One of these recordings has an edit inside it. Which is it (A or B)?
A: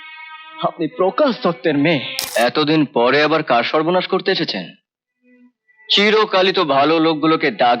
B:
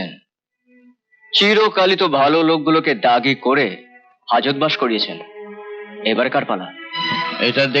A